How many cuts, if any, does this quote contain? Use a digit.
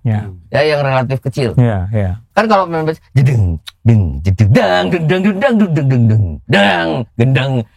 1